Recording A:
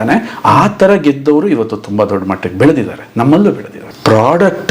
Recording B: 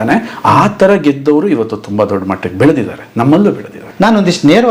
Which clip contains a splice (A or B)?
A